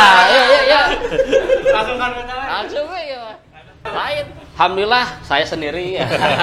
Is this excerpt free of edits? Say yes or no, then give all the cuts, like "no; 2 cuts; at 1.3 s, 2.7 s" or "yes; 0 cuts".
no; 1 cut; at 4.4 s